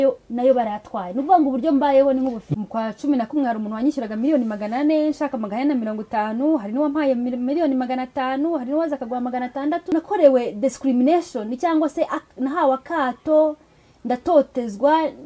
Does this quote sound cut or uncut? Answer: cut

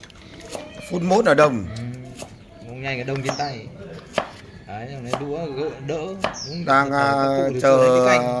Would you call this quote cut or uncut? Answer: uncut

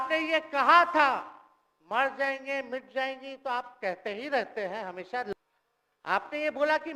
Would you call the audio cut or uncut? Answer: cut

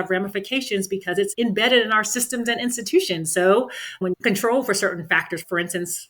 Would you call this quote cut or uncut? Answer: cut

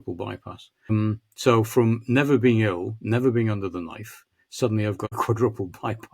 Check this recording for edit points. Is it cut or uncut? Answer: cut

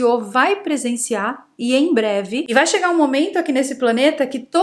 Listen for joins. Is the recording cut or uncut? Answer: uncut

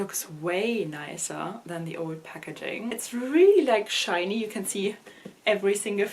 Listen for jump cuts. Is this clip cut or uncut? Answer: cut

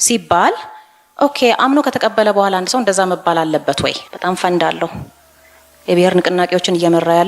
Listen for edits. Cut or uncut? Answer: cut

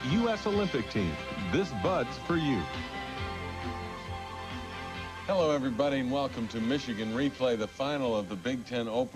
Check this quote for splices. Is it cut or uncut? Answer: uncut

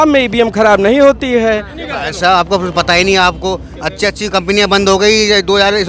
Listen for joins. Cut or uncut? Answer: cut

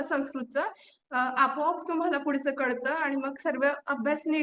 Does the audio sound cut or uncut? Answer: uncut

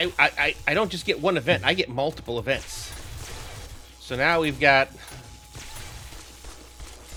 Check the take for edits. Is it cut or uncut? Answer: uncut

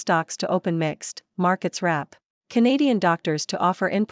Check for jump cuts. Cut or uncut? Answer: cut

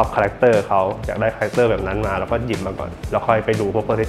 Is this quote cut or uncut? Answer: uncut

